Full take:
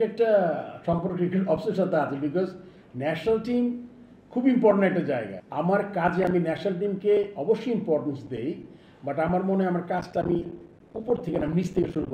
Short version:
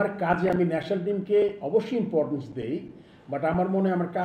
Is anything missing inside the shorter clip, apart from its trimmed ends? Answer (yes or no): no